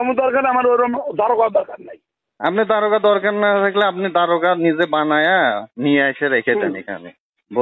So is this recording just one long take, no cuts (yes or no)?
yes